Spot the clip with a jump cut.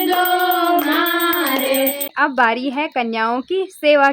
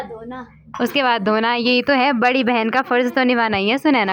first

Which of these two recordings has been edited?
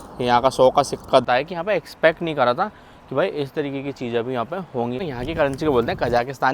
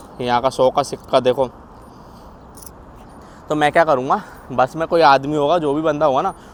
first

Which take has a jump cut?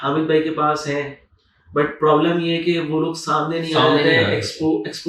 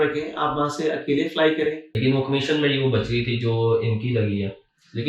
second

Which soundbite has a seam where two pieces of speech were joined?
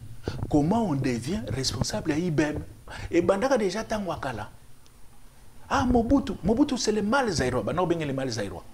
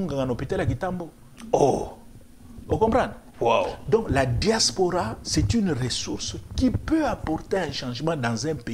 first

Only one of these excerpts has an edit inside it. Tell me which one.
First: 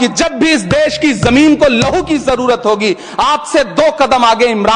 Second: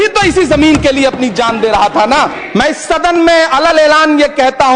second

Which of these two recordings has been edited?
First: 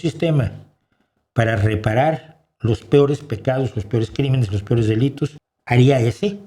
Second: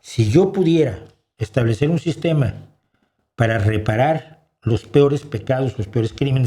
first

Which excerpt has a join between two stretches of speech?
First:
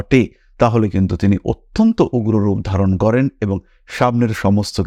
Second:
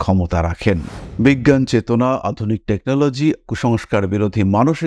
second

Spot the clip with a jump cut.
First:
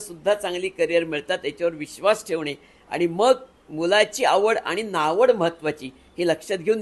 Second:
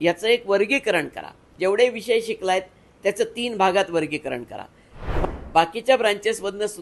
second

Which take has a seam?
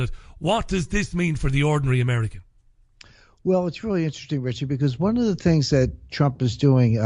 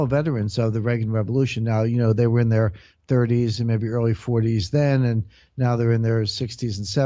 second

